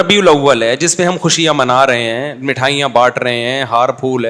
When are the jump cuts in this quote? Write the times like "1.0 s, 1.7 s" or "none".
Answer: none